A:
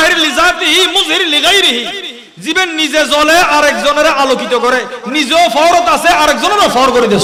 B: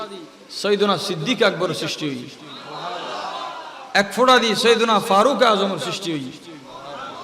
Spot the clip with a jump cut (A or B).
B